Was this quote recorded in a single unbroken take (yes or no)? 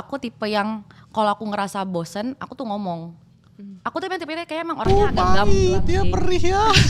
yes